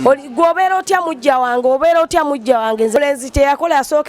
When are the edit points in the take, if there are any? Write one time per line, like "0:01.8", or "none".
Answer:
0:03.0

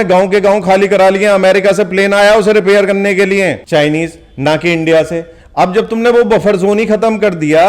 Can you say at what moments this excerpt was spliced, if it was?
0:03.6

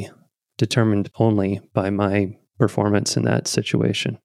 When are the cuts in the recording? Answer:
0:02.4

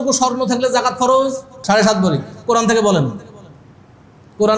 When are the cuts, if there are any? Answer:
0:01.6

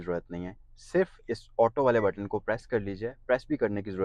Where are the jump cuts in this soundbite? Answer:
none

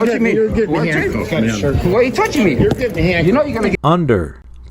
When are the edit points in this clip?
0:03.8

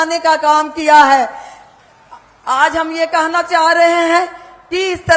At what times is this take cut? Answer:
none

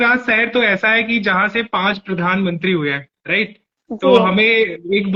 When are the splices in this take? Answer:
none

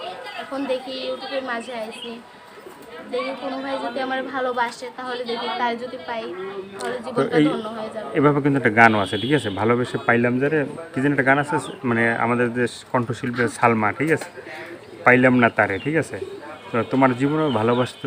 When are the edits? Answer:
none

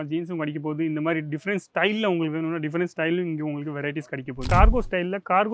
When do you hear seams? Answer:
0:04.5

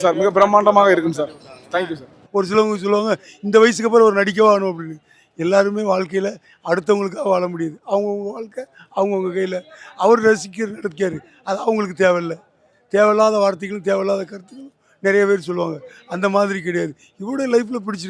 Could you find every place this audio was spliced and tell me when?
0:02.2

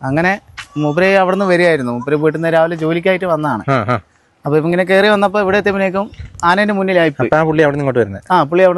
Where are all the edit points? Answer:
none

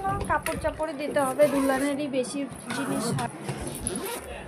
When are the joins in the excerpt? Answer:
0:03.0

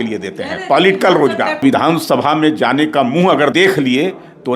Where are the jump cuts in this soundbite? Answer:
0:01.6
0:03.5

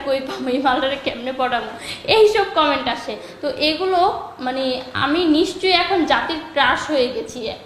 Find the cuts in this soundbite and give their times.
none

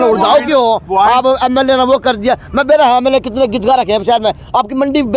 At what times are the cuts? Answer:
none

